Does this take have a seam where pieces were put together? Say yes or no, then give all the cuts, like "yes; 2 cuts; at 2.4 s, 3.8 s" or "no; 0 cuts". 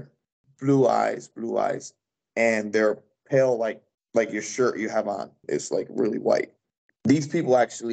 yes; 2 cuts; at 5.4 s, 6.8 s